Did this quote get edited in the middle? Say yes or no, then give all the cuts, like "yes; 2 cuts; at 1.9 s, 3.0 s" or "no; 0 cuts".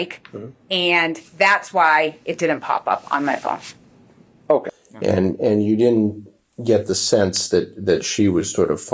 yes; 1 cut; at 4.8 s